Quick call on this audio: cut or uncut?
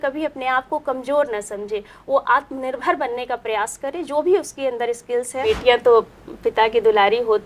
cut